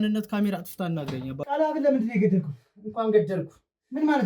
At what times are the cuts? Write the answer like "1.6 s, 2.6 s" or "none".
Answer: 1.4 s